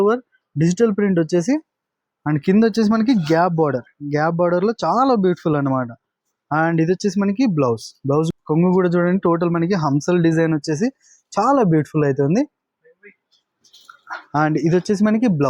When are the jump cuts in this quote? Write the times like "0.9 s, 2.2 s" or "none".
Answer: 8.3 s

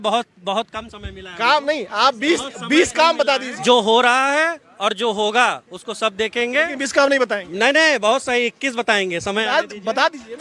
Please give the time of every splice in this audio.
3.5 s

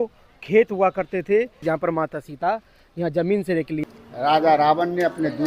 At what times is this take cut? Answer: 1.6 s, 3.8 s

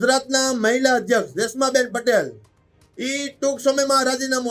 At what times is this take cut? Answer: none

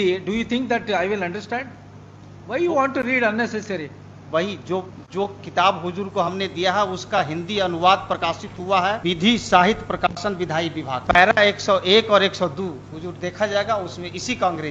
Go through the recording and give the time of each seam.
none

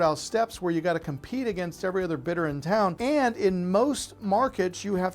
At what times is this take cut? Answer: 3.0 s

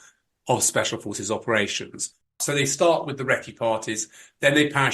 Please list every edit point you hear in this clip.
2.4 s

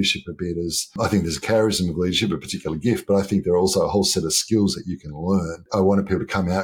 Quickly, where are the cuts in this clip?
0.9 s, 5.6 s

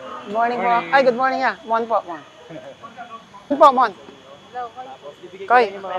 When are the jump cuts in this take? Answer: 3.5 s

